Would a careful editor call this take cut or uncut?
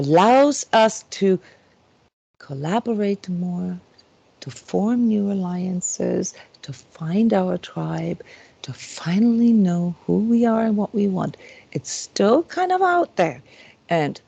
uncut